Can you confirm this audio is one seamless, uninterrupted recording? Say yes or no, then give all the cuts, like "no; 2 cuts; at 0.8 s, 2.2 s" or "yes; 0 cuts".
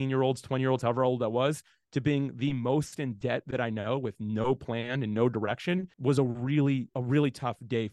no; 2 cuts; at 5.9 s, 6.9 s